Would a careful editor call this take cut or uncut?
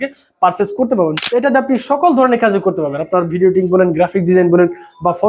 cut